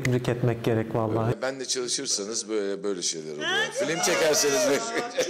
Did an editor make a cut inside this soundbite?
yes; 1 cut; at 1.4 s

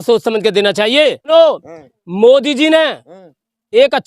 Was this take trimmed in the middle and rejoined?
yes; 1 cut; at 1.3 s

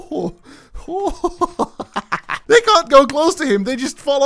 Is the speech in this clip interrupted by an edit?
yes; 1 cut; at 2.3 s

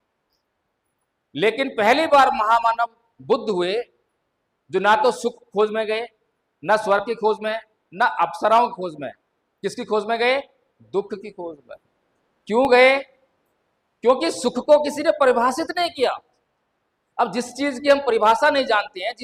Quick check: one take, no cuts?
yes; 0 cuts

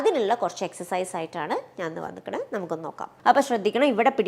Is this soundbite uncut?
no; 1 cut; at 3.1 s

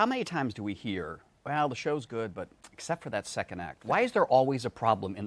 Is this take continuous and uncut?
yes; 0 cuts

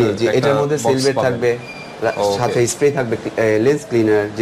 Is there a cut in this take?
no; 0 cuts

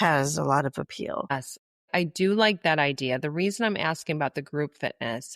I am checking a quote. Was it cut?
yes; 1 cut; at 1.8 s

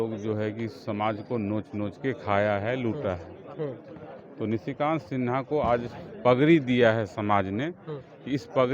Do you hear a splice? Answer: no; 0 cuts

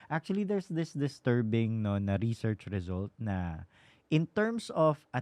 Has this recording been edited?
no; 0 cuts

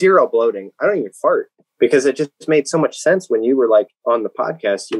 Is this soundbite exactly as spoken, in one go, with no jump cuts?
no; 2 cuts; at 1.6 s, 3.9 s

